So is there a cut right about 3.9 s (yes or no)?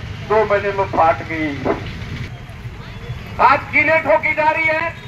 no